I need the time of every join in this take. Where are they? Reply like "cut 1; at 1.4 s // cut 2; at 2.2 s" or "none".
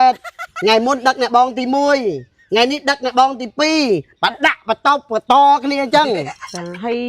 none